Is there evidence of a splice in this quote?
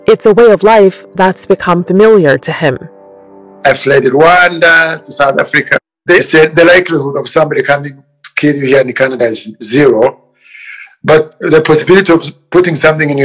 yes; 1 cut; at 5.7 s

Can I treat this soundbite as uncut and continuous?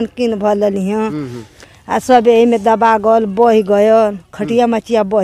yes; 0 cuts

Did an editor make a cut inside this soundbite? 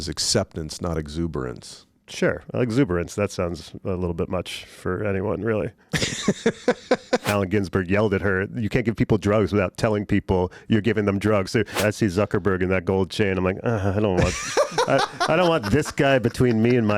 yes; 2 cuts; at 7.3 s, 11.8 s

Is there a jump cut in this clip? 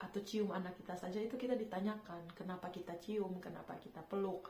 no; 0 cuts

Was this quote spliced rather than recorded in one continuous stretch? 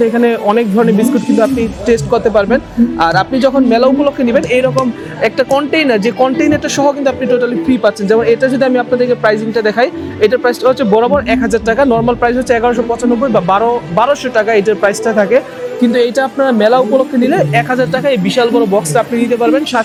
no; 0 cuts

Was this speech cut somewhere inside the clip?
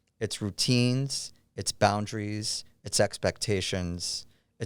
no; 0 cuts

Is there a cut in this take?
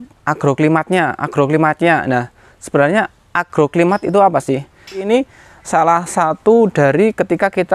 yes; 1 cut; at 5.0 s

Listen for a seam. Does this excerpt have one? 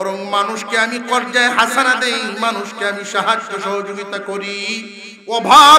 no; 0 cuts

